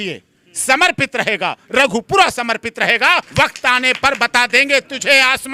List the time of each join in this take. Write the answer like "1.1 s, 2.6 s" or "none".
3.3 s